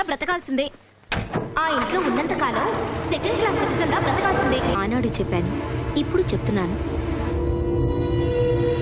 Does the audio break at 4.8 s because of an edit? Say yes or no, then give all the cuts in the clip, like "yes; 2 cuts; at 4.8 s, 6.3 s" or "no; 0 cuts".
yes; 1 cut; at 4.8 s